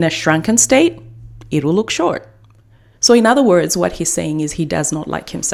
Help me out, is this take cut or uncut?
uncut